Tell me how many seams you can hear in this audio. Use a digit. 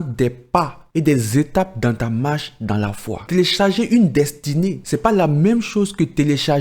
2